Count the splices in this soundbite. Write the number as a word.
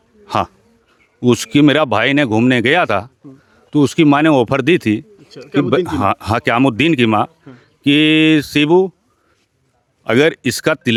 zero